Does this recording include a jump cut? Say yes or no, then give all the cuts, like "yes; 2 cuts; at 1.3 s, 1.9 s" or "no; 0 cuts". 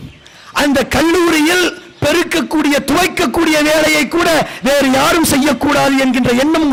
no; 0 cuts